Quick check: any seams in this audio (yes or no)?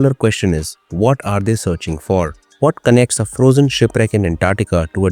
yes